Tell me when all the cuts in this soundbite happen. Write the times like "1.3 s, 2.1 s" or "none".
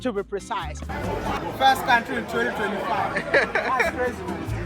1.4 s